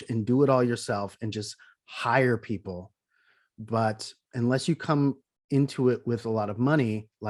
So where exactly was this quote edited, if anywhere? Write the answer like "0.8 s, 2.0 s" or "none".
none